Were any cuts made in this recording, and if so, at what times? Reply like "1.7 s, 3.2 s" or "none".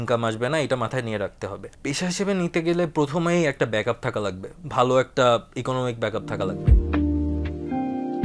2.0 s, 6.8 s